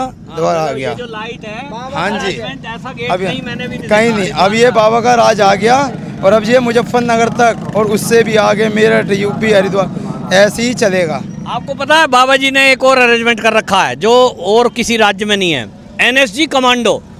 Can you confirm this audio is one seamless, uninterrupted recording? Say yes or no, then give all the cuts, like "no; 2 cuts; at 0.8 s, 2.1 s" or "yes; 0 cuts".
yes; 0 cuts